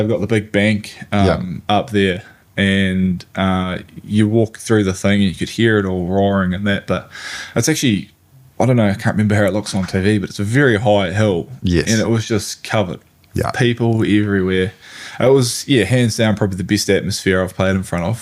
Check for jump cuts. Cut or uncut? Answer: uncut